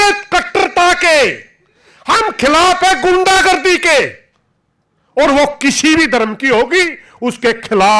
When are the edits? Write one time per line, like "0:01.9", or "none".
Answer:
none

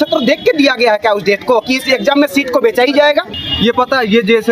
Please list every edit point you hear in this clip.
0:03.3

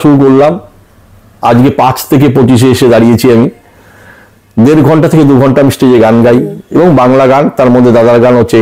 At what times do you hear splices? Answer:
none

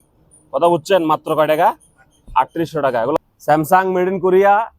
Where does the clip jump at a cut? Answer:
0:03.2

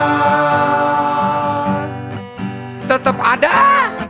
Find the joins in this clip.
none

